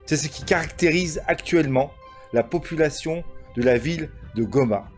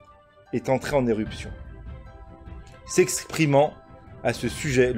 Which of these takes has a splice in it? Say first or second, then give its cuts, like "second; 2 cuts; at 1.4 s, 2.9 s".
second; 2 cuts; at 1.4 s, 2.9 s